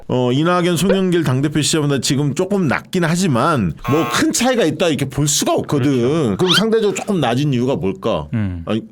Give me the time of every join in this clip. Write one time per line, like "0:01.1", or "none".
0:03.8
0:06.3